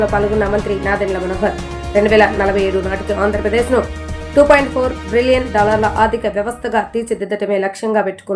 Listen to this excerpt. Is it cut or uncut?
uncut